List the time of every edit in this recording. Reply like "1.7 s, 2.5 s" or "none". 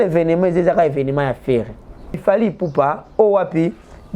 2.2 s

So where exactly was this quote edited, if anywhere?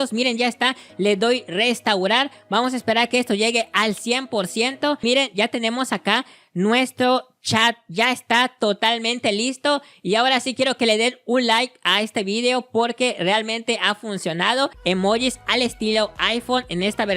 5.0 s, 14.8 s

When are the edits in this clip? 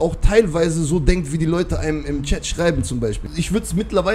3.2 s

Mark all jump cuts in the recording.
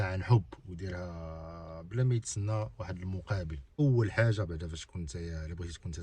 3.8 s

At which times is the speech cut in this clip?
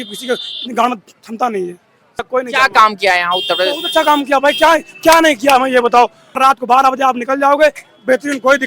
2.2 s, 6.2 s

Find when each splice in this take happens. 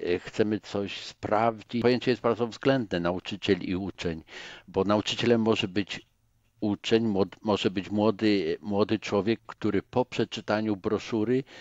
1.8 s

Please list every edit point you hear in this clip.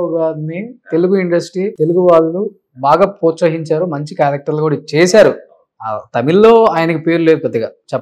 1.7 s

